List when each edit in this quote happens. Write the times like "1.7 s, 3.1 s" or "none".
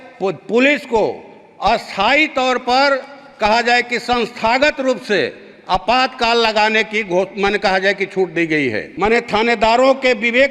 8.8 s